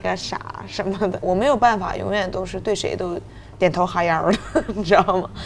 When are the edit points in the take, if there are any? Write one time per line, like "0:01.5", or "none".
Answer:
0:01.2